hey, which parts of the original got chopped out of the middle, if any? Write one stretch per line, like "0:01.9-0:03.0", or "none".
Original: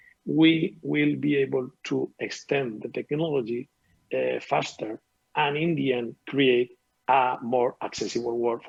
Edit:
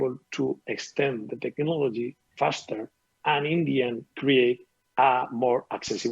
0:03.8-0:04.4